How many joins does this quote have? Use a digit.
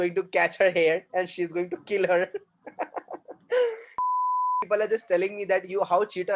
1